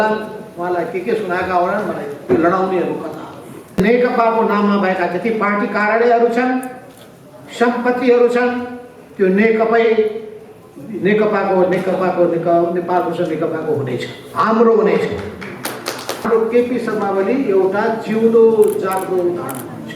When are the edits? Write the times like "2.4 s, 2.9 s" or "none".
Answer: 3.8 s, 16.3 s